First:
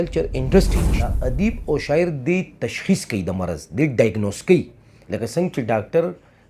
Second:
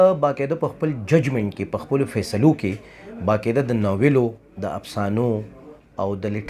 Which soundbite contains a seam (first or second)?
first